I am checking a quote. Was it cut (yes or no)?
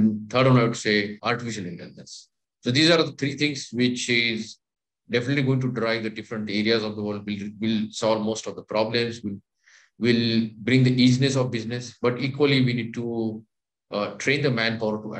yes